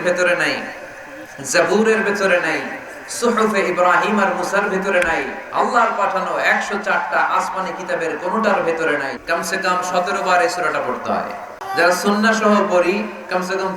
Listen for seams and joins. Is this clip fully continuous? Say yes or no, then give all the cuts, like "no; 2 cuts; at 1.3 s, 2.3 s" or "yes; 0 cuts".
no; 2 cuts; at 9.1 s, 11.6 s